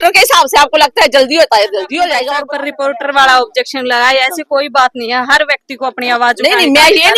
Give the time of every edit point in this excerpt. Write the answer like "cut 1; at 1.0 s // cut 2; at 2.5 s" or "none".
cut 1; at 2.3 s